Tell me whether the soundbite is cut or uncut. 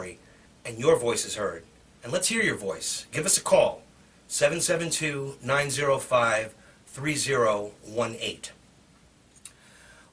cut